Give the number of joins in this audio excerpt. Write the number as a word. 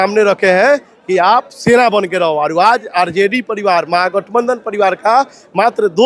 zero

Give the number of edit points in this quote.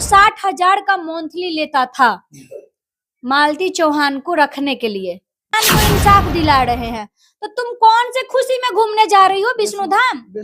one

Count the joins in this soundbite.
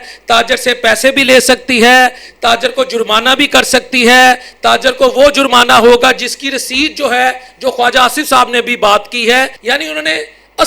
one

